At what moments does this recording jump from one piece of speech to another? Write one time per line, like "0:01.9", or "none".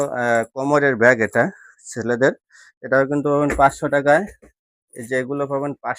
none